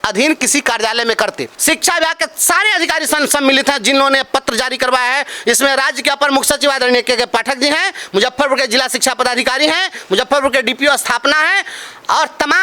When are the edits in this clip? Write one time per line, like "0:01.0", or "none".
0:01.5